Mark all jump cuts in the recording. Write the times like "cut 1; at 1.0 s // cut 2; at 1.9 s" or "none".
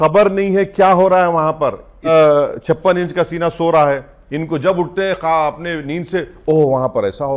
cut 1; at 2.1 s